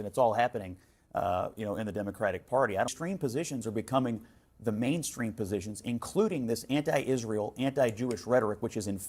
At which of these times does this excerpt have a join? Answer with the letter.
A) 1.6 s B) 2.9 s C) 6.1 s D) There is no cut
B